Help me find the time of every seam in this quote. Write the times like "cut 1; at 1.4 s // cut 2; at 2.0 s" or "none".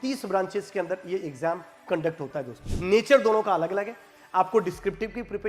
cut 1; at 2.6 s